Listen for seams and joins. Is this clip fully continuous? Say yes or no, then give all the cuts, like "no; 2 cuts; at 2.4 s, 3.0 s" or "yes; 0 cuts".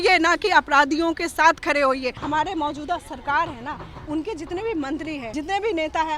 no; 2 cuts; at 2.2 s, 5.3 s